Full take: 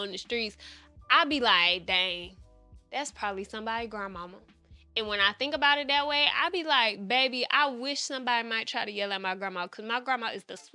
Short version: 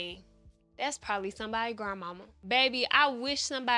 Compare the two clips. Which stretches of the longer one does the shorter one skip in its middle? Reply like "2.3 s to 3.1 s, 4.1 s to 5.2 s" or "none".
4.5 s to 7.0 s